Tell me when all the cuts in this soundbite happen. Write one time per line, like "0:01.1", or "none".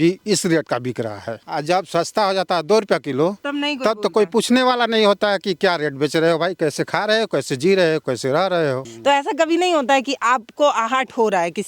0:01.4
0:08.9